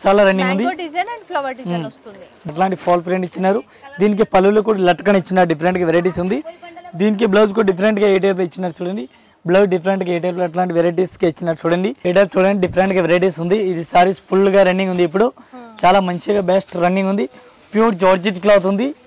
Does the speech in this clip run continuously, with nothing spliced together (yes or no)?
no